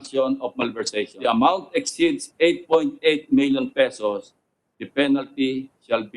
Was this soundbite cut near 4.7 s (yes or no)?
no